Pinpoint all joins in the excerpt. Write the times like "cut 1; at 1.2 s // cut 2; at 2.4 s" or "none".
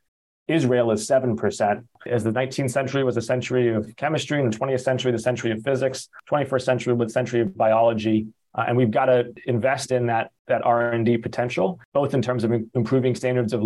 cut 1; at 2.0 s // cut 2; at 6.1 s // cut 3; at 8.4 s // cut 4; at 9.4 s // cut 5; at 10.4 s // cut 6; at 11.8 s